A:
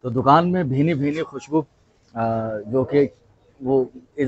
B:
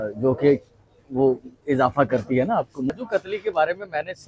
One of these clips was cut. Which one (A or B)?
B